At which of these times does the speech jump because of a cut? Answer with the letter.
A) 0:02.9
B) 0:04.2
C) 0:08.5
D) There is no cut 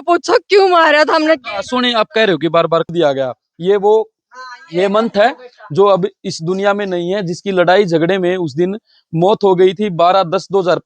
A